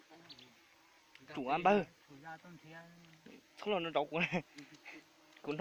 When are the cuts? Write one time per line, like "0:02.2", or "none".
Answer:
none

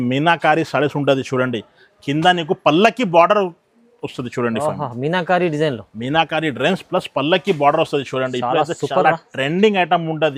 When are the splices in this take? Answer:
none

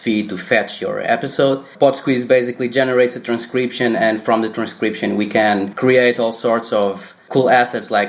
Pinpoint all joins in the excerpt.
0:01.7
0:05.7
0:07.1

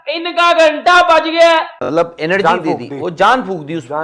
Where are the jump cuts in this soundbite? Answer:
0:01.8

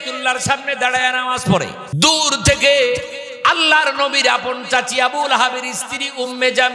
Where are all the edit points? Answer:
0:01.8

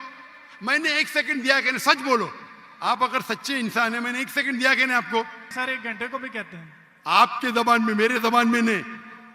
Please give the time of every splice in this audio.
0:05.5

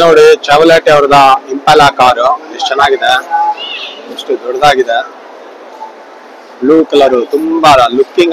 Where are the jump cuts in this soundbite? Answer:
none

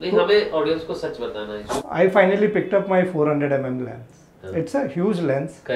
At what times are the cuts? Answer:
0:01.7

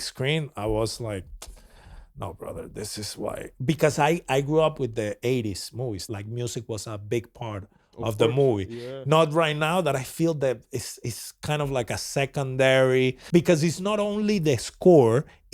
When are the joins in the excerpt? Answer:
0:06.0
0:13.2

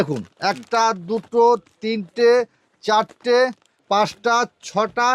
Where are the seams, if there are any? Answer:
0:03.7

